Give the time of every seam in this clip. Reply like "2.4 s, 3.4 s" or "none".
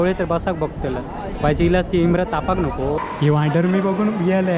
3.1 s